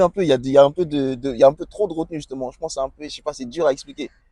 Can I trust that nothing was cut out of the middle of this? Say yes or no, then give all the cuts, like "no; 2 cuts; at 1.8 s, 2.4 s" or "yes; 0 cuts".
yes; 0 cuts